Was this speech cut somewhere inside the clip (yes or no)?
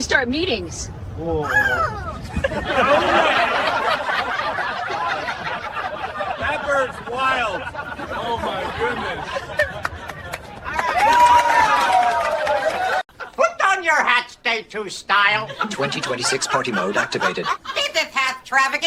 no